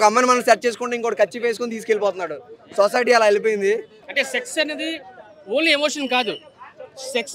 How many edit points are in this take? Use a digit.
1